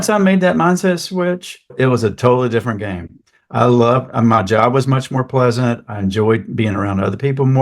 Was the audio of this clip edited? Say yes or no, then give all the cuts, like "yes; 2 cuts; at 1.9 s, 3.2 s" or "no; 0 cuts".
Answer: yes; 1 cut; at 1.7 s